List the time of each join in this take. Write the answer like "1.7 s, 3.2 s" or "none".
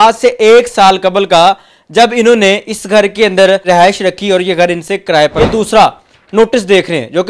3.6 s, 5.4 s